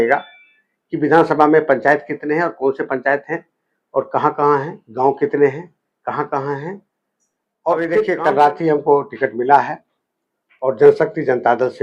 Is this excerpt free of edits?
no; 1 cut; at 8.1 s

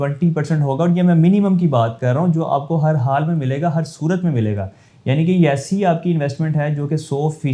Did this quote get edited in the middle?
no; 0 cuts

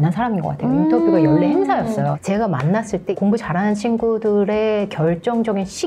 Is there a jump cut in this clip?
yes; 1 cut; at 2.2 s

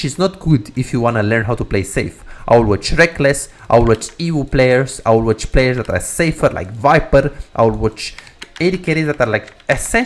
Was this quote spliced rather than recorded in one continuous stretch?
no; 0 cuts

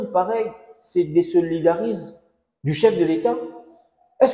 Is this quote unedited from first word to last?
yes; 0 cuts

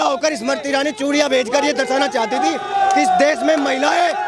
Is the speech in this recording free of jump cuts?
yes; 0 cuts

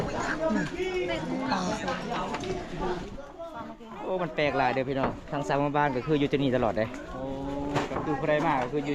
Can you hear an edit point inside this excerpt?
no; 0 cuts

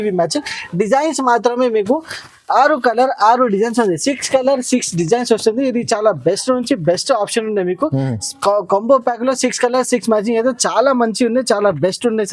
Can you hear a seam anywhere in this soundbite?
no; 0 cuts

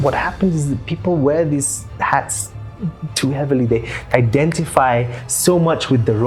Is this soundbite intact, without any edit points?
yes; 0 cuts

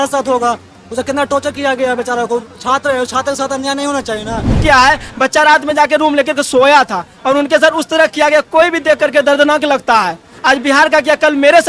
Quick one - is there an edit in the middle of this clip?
yes; 1 cut; at 4.6 s

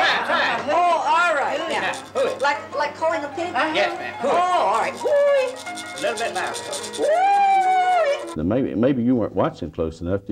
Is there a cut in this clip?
yes; 1 cut; at 8.3 s

